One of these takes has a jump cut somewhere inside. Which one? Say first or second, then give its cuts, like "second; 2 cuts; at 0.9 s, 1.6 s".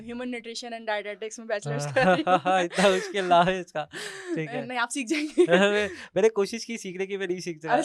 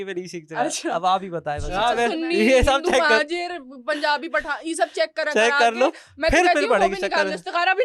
second; 1 cut; at 1.7 s